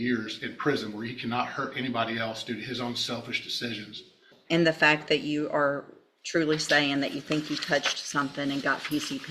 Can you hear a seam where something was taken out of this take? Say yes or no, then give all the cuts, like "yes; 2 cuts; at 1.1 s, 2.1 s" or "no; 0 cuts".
yes; 1 cut; at 4.3 s